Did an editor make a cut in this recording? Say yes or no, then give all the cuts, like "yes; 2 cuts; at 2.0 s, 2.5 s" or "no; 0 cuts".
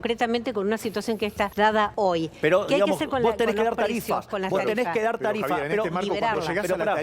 yes; 1 cut; at 1.8 s